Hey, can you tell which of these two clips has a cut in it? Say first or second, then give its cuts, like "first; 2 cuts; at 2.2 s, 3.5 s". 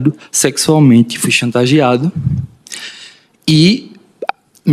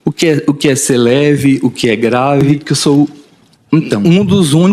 second; 1 cut; at 2.6 s